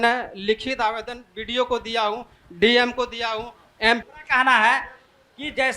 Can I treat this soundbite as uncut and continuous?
no; 1 cut; at 4.0 s

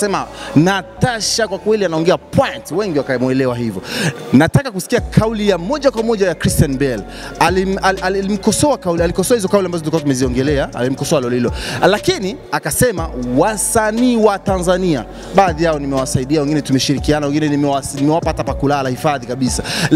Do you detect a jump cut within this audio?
no; 0 cuts

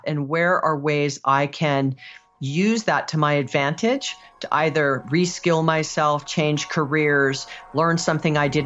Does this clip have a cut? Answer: no; 0 cuts

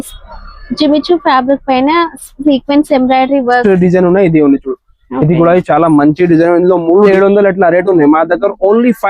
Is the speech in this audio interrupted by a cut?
yes; 2 cuts; at 3.6 s, 7.1 s

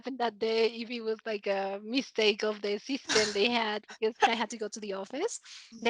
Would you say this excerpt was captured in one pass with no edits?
no; 1 cut; at 4.3 s

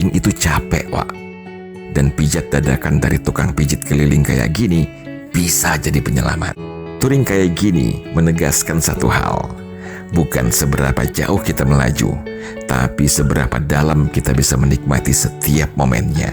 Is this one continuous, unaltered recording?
no; 1 cut; at 6.6 s

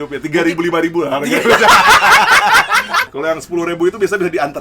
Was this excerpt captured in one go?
no; 1 cut; at 3.0 s

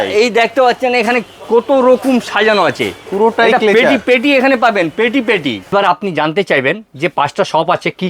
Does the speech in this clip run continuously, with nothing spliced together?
no; 1 cut; at 5.7 s

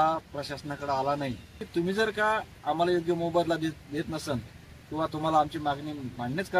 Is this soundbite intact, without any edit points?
no; 1 cut; at 1.6 s

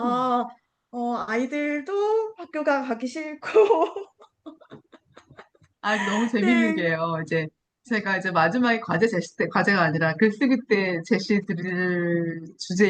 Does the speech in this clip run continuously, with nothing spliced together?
yes; 0 cuts

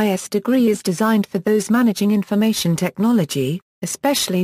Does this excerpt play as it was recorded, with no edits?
no; 2 cuts; at 0.7 s, 1.3 s

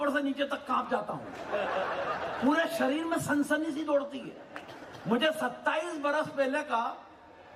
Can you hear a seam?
no; 0 cuts

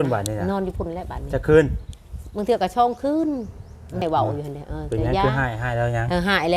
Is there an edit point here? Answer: yes; 1 cut; at 4.0 s

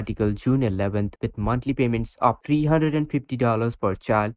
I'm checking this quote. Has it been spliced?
yes; 1 cut; at 1.1 s

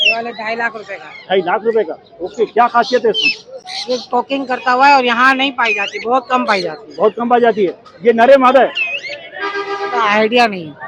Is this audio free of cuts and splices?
yes; 0 cuts

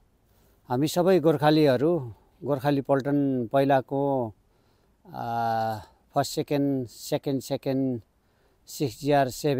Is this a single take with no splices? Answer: yes; 0 cuts

